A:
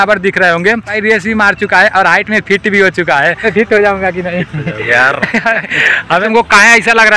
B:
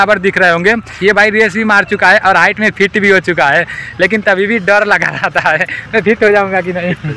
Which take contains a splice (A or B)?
A